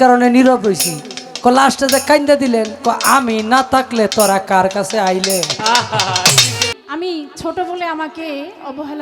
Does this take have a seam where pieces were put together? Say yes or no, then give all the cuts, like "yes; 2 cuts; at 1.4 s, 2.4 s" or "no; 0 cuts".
yes; 1 cut; at 6.7 s